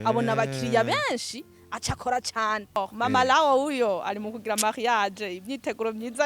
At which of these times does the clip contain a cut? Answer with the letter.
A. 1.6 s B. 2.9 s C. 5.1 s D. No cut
B